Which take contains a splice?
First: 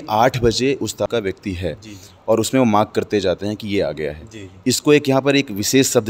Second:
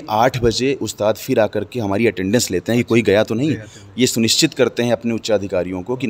first; 1 cut; at 1.1 s

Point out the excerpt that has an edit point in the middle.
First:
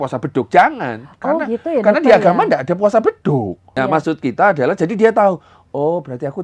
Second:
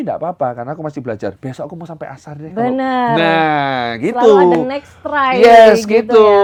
first; 1 cut; at 3.8 s

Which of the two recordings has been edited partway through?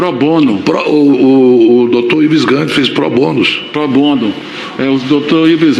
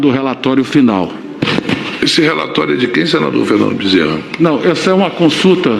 second; 1 cut; at 1.4 s

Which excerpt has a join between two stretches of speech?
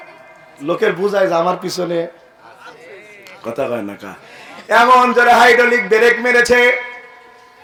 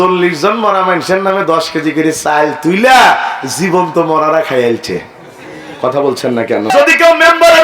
second; 1 cut; at 6.7 s

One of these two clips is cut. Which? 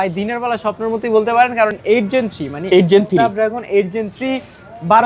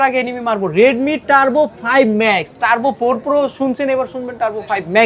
first; 1 cut; at 1.8 s

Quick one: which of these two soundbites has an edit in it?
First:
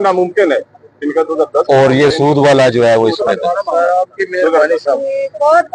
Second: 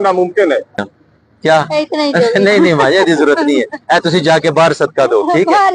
second; 1 cut; at 0.9 s

